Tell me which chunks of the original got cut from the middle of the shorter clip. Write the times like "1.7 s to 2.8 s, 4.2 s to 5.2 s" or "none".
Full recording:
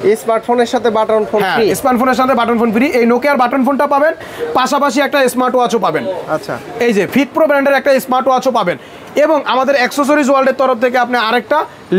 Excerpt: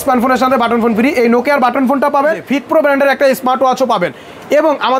4.2 s to 7.1 s

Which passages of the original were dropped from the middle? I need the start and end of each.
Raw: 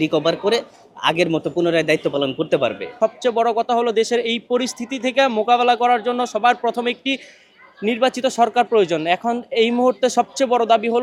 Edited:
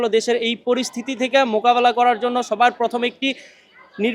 none

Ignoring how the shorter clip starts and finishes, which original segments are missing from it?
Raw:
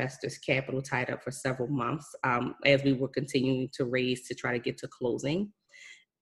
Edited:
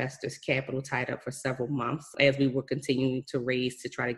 2.1 s to 2.5 s

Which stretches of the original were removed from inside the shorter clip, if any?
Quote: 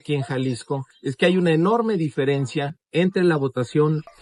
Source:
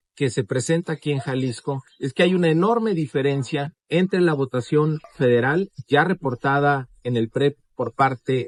none

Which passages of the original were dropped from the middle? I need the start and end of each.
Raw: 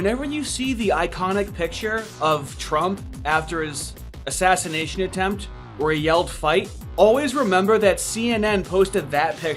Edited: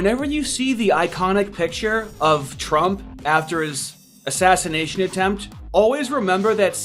5.6 s to 6.8 s

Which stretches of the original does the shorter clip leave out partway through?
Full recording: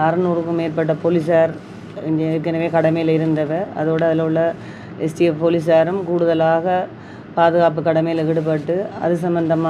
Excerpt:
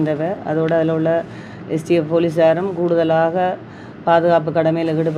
none

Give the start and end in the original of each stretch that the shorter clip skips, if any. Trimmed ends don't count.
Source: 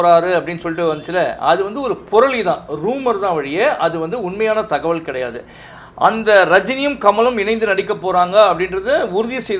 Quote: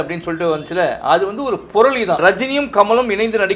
2.6 s to 6.5 s

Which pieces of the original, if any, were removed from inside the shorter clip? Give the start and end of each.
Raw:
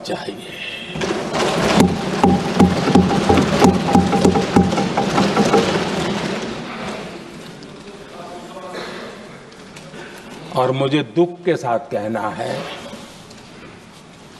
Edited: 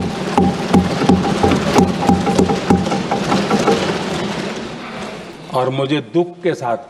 7.2 s to 10.3 s

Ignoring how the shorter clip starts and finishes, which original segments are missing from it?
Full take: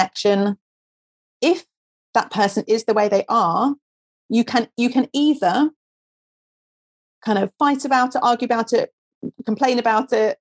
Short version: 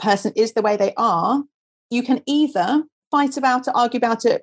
4.2 s to 4.7 s, 5.9 s to 7.5 s

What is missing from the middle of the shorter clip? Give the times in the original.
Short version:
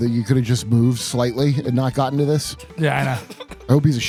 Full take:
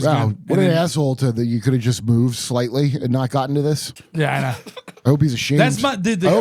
none

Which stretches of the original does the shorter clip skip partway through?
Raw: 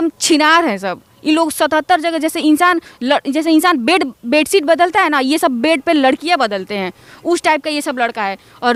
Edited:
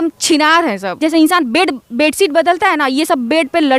0.9 s to 3.3 s

